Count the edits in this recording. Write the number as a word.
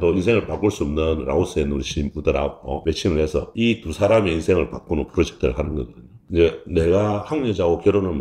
one